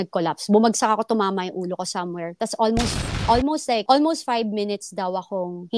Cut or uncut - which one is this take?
uncut